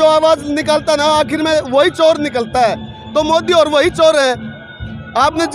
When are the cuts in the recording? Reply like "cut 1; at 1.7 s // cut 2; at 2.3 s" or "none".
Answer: none